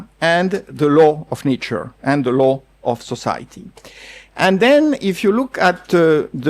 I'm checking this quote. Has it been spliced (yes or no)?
no